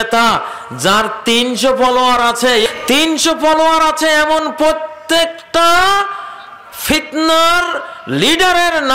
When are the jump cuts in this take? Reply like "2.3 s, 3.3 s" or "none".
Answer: 2.7 s